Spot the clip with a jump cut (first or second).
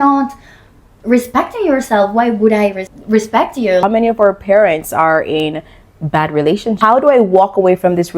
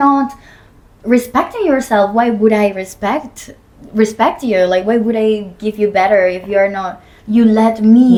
first